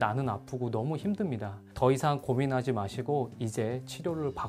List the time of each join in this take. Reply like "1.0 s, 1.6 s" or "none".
1.6 s